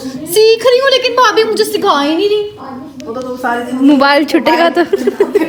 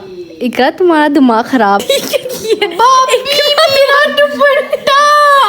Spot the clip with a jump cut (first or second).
second